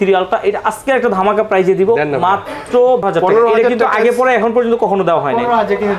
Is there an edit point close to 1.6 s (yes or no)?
no